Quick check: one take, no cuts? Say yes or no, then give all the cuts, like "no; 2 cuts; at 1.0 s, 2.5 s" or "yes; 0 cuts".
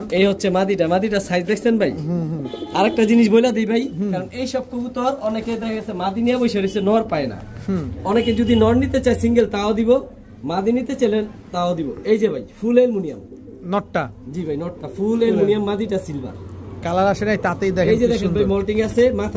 yes; 0 cuts